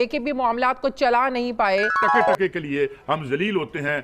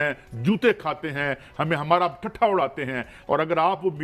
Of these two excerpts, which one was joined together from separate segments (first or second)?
first